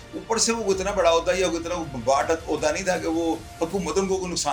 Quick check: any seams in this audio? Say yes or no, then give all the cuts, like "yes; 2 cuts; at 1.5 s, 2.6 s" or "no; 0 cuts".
no; 0 cuts